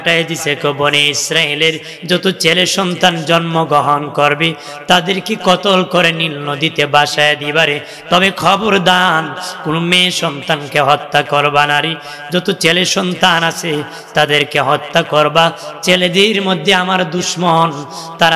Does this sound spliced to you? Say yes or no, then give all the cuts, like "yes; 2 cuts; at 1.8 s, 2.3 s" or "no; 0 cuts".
no; 0 cuts